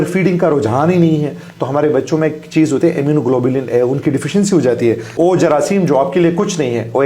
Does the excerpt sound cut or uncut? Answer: cut